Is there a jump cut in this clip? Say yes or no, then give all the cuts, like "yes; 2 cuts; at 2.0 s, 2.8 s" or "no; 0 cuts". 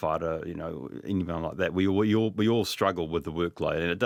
no; 0 cuts